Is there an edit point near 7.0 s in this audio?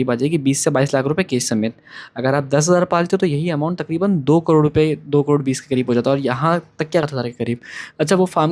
yes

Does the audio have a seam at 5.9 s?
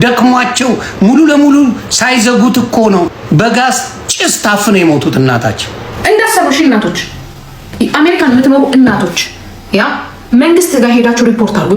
yes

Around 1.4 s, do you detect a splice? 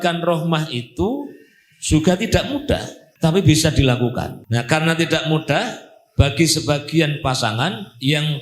no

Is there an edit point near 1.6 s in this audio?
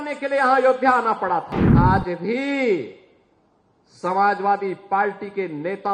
yes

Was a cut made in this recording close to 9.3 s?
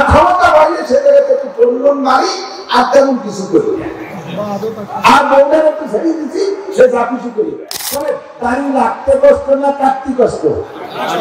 no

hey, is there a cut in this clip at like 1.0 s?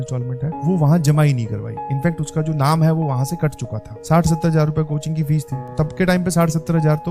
no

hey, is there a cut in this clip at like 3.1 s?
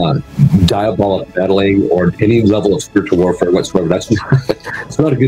no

